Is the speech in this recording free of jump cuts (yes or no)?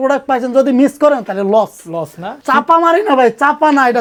yes